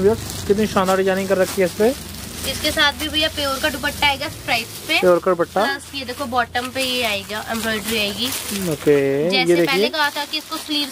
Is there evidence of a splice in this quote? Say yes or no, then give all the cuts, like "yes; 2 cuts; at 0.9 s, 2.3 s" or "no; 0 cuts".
no; 0 cuts